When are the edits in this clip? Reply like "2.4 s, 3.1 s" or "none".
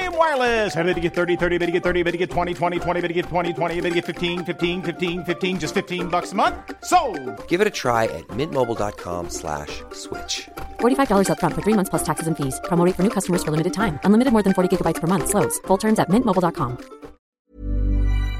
17.3 s